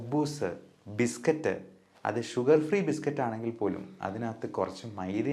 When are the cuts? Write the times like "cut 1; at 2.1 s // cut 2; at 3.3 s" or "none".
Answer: none